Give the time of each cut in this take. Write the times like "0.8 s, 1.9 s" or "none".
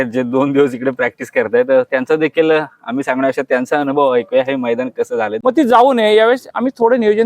5.3 s

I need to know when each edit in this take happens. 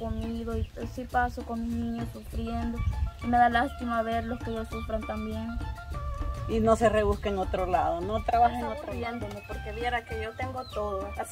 8.8 s

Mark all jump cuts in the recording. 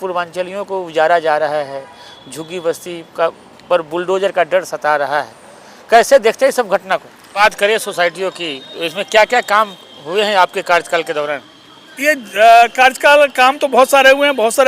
7.3 s

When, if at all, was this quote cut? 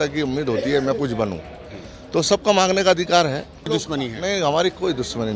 3.7 s

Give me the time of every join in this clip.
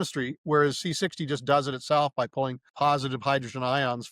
2.6 s

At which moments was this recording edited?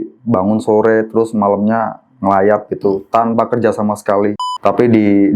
4.5 s

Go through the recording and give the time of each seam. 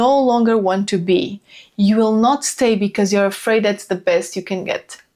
none

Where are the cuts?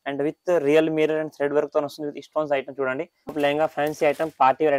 3.3 s

